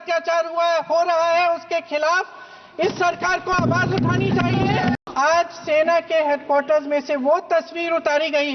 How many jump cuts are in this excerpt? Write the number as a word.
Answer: one